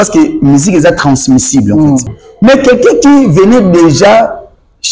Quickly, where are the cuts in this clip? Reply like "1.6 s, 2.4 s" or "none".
2.2 s

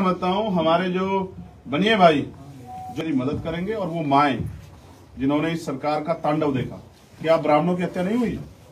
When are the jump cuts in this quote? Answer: 3.0 s

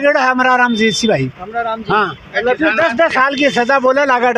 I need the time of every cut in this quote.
none

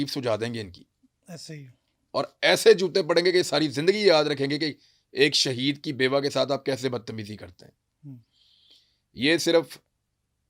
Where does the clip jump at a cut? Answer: none

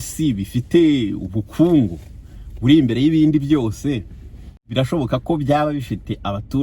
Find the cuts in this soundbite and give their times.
4.6 s

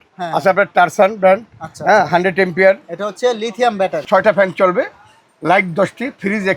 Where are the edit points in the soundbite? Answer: 4.0 s

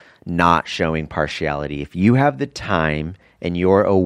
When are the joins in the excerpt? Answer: none

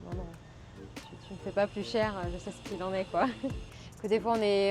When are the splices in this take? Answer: 3.8 s

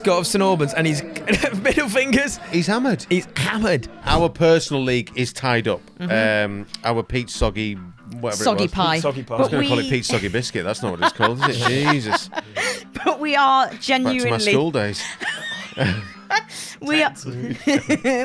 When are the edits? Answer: 4.0 s

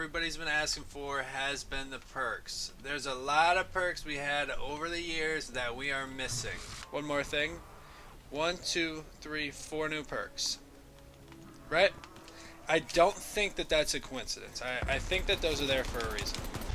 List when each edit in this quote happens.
none

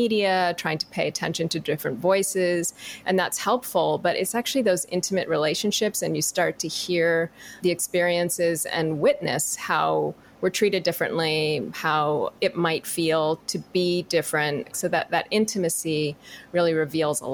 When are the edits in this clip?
7.6 s, 12.3 s, 13.5 s, 14.7 s

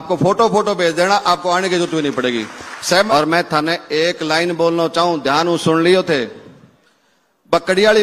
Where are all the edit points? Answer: 3.1 s

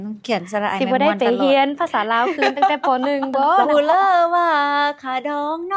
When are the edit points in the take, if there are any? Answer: 3.7 s

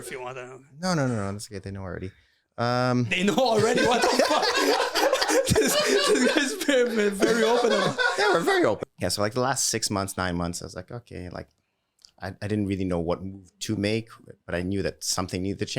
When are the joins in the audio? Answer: 8.8 s

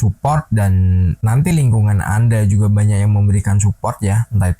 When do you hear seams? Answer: 1.2 s

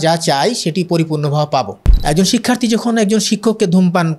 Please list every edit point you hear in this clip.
1.8 s

